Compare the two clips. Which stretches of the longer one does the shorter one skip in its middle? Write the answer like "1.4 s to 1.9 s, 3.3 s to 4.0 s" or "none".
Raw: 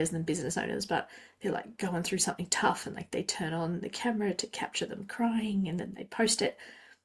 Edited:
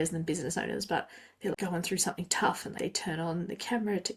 1.6 s to 1.8 s, 2.9 s to 3.0 s